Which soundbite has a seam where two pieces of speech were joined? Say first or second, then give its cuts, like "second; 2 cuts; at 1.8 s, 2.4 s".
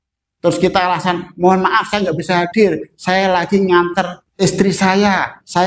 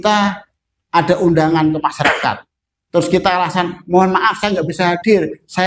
first; 1 cut; at 4.2 s